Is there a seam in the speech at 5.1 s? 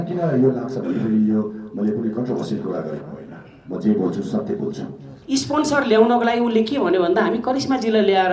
yes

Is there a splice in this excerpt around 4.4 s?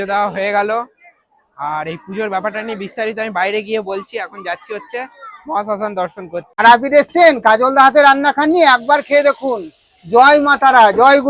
no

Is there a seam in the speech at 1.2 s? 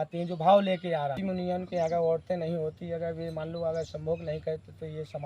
yes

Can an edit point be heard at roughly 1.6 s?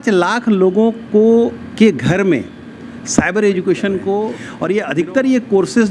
no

